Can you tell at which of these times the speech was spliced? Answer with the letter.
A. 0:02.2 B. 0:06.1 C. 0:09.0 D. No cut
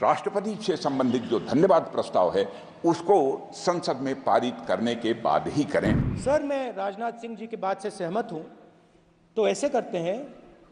B